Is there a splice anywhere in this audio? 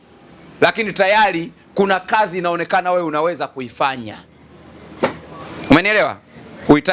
no; 0 cuts

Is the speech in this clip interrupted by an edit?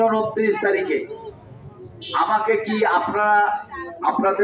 no; 0 cuts

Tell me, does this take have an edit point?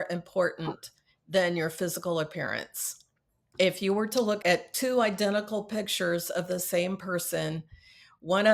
yes; 1 cut; at 4.4 s

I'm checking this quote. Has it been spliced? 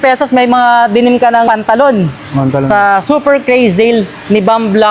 yes; 1 cut; at 1.5 s

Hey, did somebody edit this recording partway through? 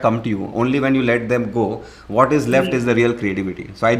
no; 0 cuts

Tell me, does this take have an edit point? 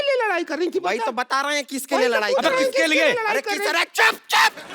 yes; 1 cut; at 2.2 s

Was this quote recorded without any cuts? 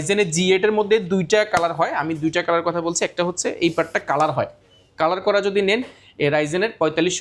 yes; 0 cuts

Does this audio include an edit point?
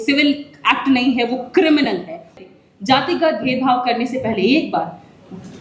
yes; 1 cut; at 2.3 s

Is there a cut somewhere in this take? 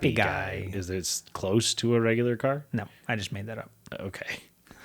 no; 0 cuts

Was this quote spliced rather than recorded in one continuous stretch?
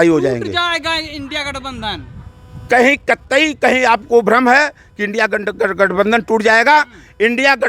no; 0 cuts

